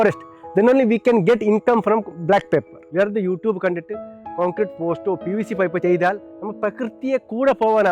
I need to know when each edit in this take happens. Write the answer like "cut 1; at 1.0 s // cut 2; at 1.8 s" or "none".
none